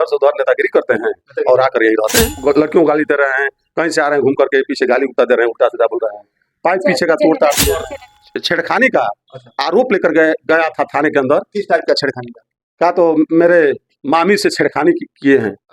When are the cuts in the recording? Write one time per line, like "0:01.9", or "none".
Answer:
0:02.3
0:07.9